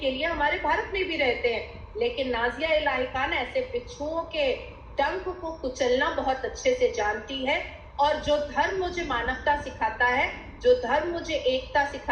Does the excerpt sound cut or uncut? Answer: uncut